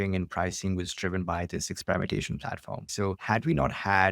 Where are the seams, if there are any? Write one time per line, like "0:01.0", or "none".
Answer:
0:03.0